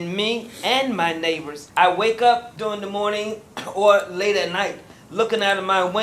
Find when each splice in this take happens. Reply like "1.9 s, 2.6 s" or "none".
1.5 s, 2.5 s